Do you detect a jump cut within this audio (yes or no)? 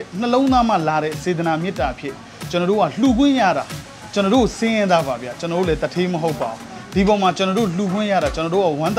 no